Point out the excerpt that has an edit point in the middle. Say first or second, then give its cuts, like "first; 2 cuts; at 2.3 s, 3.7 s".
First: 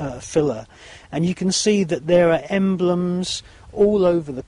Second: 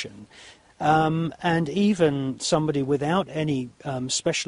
first; 1 cut; at 1.2 s